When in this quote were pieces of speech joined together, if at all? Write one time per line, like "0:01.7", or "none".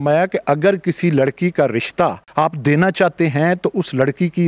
0:02.2